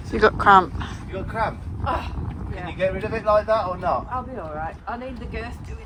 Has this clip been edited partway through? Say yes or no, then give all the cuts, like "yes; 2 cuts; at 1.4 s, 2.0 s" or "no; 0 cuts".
no; 0 cuts